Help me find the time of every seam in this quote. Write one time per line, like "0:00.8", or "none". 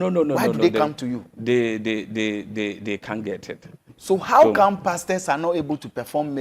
0:03.9